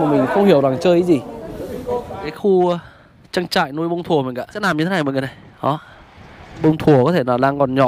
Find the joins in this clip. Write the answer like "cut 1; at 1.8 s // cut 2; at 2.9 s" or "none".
cut 1; at 2.3 s // cut 2; at 4.6 s // cut 3; at 6.6 s